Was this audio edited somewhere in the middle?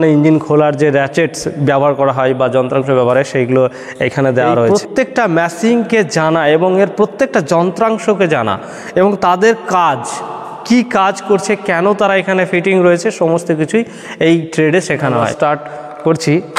yes; 2 cuts; at 4.7 s, 15.3 s

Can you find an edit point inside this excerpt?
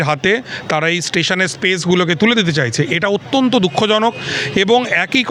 no; 0 cuts

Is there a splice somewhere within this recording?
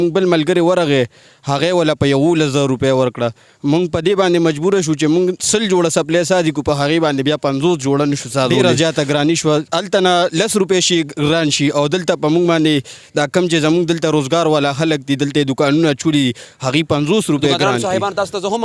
yes; 2 cuts; at 8.5 s, 17.7 s

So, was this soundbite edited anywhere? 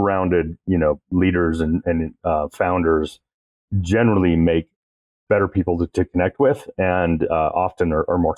no; 0 cuts

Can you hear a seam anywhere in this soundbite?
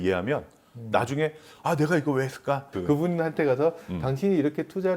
yes; 1 cut; at 2.7 s

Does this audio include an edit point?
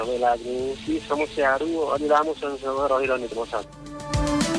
yes; 2 cuts; at 0.8 s, 3.7 s

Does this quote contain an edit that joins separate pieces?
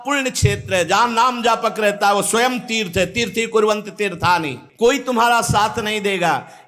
yes; 1 cut; at 4.6 s

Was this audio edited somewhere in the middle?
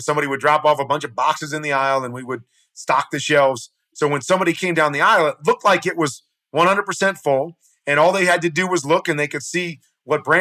yes; 1 cut; at 3.8 s

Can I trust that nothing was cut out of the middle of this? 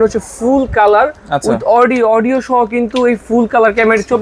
yes; 0 cuts

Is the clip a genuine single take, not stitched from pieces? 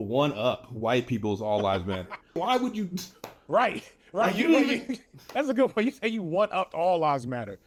yes; 0 cuts

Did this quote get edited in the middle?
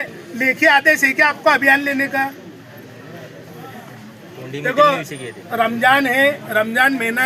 no; 0 cuts

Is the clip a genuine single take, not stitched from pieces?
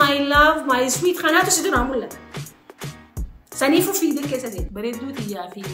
no; 1 cut; at 4.7 s

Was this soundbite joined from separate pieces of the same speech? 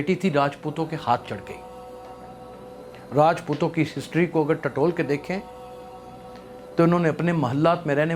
no; 0 cuts

